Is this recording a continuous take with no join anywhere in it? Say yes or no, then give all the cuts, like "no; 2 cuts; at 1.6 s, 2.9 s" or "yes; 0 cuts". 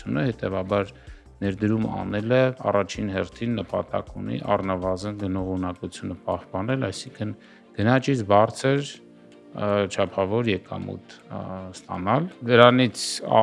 yes; 0 cuts